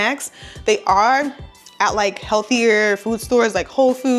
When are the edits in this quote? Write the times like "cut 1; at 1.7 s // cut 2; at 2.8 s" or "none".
none